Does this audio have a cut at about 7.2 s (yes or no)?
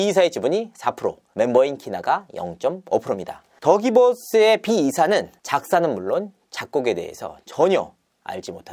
no